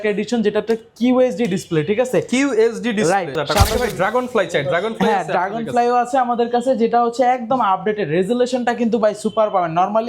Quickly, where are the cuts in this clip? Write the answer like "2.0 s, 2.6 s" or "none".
3.4 s